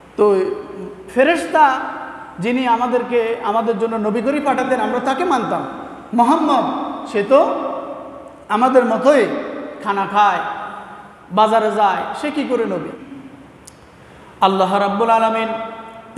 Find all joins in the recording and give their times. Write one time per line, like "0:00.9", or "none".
0:13.0

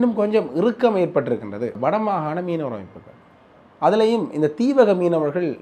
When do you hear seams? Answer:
0:01.8

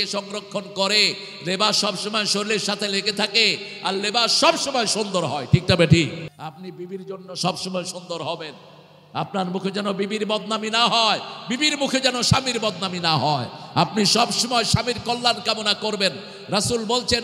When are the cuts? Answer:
0:06.3

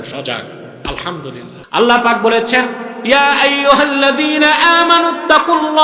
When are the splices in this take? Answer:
0:01.6

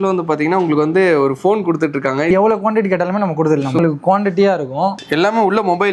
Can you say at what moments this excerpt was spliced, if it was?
0:02.3
0:03.8
0:05.0

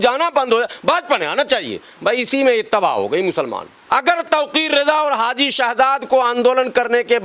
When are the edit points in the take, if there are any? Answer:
0:03.7

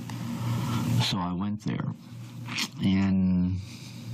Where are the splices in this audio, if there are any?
0:02.5

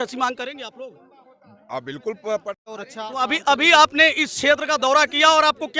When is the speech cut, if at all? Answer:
0:02.6

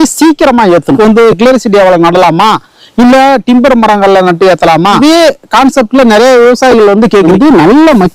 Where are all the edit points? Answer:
0:01.0
0:05.0
0:07.3

